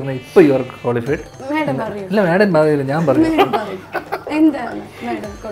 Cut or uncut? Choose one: cut